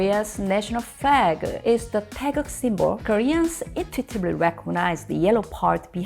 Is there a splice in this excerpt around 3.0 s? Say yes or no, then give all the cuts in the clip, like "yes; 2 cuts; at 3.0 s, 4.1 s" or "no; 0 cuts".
yes; 1 cut; at 3.0 s